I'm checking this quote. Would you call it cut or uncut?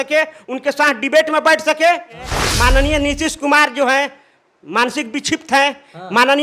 cut